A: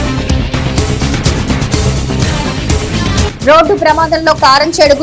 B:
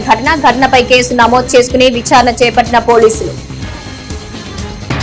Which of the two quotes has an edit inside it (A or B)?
A